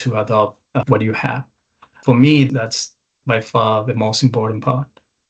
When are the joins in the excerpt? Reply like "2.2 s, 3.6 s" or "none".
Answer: 0.8 s, 1.9 s, 2.5 s